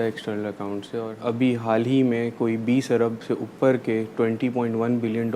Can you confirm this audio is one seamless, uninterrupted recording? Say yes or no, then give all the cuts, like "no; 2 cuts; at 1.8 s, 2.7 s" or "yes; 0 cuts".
no; 1 cut; at 1.1 s